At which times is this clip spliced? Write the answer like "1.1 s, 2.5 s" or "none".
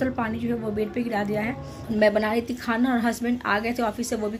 1.7 s